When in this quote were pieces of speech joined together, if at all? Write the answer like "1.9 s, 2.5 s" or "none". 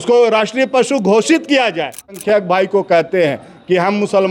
2.2 s